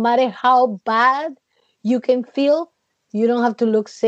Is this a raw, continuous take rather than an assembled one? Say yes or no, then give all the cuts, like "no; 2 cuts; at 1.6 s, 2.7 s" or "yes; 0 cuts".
yes; 0 cuts